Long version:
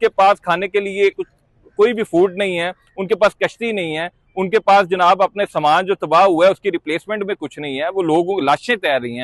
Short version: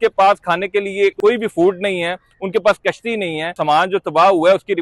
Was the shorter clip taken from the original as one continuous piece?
no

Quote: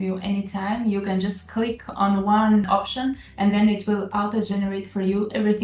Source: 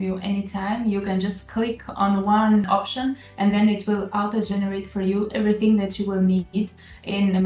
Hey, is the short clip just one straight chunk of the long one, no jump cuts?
yes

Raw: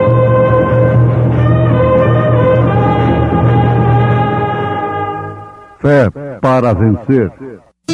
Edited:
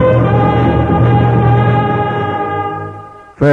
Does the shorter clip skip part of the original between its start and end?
no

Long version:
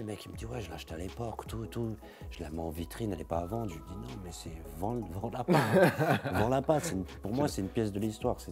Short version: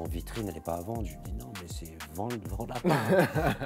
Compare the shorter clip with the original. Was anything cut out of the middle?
no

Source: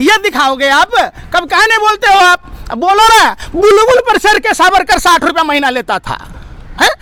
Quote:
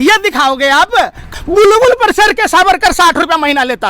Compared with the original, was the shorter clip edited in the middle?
yes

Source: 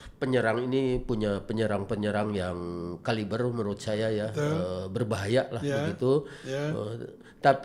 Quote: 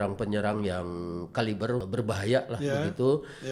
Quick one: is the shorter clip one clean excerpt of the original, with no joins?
no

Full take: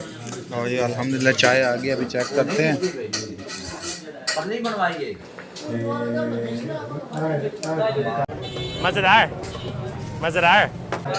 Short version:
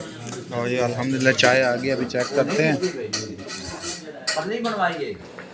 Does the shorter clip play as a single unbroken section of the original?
yes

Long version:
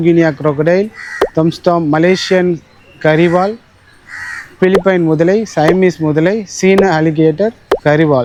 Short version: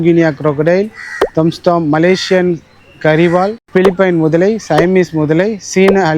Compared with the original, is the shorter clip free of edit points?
no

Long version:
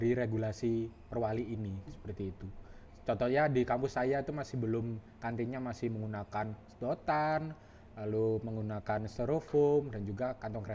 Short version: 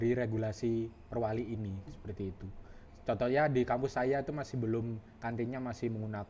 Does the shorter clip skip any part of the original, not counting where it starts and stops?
no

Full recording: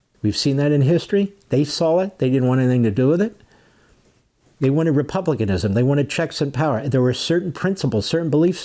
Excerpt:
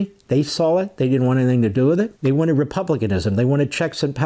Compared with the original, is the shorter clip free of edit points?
no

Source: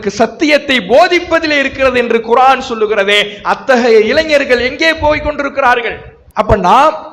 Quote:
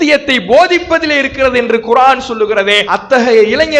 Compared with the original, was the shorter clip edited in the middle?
yes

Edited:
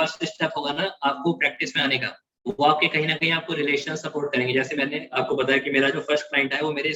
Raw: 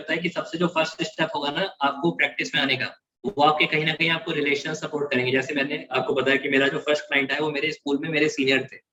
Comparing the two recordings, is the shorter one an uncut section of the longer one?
yes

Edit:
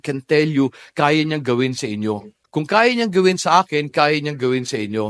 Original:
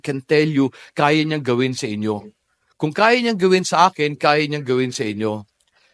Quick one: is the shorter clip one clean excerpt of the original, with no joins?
no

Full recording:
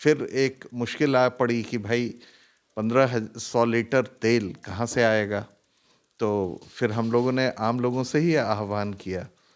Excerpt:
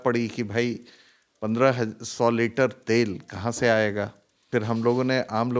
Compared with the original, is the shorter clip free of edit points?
no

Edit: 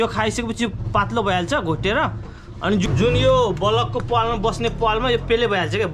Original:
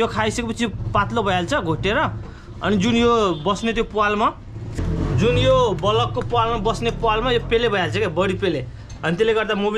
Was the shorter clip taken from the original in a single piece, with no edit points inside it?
no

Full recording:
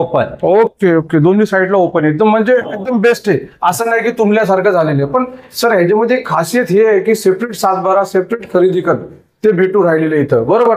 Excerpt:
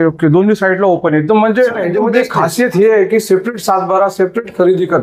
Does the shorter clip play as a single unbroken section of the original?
no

